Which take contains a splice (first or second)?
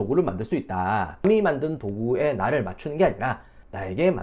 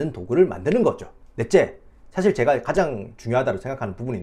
first